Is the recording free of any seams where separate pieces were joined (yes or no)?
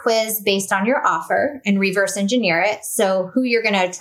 yes